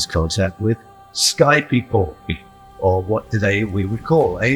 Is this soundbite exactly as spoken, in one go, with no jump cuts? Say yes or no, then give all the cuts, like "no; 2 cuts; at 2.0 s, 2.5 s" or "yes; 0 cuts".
yes; 0 cuts